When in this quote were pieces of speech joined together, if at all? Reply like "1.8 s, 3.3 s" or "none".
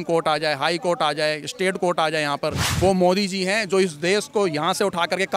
2.6 s